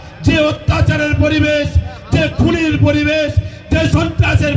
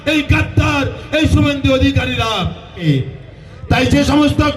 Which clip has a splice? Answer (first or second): second